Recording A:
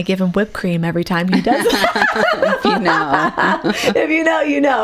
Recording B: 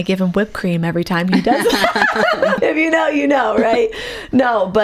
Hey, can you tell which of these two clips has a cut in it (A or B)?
B